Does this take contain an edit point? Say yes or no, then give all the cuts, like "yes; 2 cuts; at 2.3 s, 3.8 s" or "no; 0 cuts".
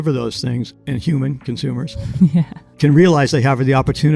no; 0 cuts